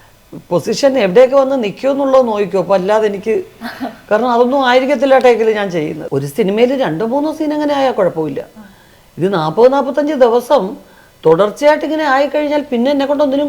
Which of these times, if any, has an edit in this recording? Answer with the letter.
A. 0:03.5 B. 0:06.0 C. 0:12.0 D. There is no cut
B